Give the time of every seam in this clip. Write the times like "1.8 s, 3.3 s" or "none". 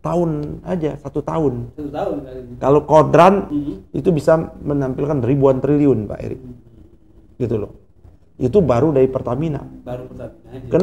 3.5 s